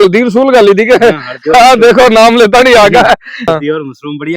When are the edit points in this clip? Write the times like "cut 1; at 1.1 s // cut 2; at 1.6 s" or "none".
cut 1; at 3.5 s